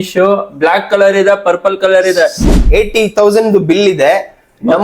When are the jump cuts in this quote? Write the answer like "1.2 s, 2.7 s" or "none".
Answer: 2.5 s